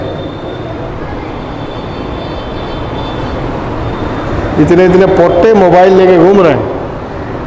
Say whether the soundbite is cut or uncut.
uncut